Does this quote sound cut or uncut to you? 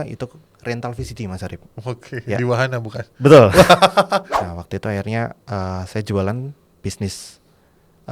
cut